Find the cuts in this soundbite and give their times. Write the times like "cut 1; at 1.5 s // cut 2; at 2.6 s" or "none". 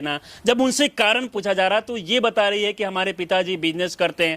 cut 1; at 1.3 s